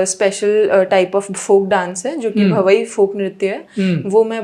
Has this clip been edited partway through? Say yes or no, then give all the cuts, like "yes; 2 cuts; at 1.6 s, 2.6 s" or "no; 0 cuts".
no; 0 cuts